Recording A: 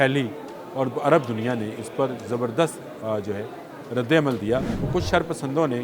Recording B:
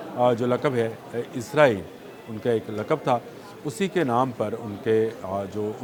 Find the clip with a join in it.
A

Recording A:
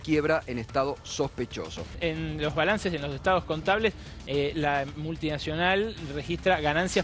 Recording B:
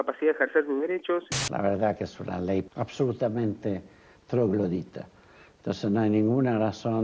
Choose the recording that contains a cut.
B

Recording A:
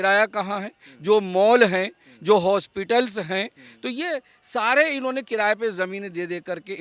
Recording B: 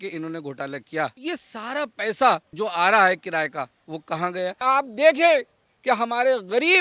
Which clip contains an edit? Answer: B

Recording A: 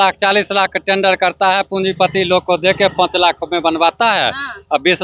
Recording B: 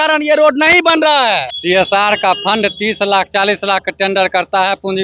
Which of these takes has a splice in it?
B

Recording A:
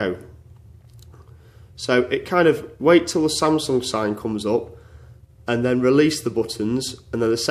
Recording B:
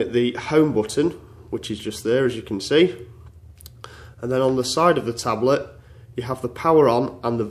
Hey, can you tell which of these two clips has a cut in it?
A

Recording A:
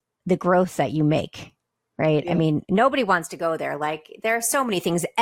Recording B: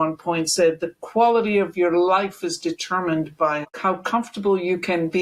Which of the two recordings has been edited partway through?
B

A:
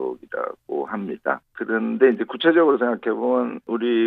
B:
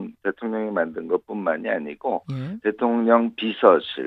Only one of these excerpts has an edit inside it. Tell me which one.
B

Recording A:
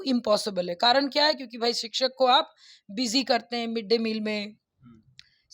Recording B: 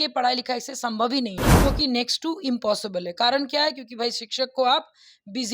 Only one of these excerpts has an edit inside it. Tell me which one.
B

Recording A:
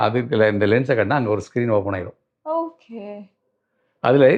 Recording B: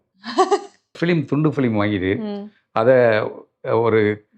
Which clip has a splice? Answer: B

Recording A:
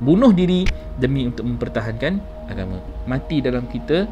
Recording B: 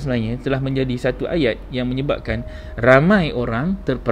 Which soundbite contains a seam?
A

